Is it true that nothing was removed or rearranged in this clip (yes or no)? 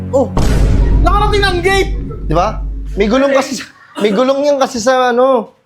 yes